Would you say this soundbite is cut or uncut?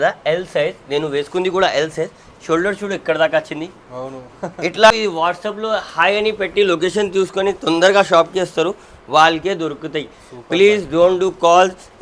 cut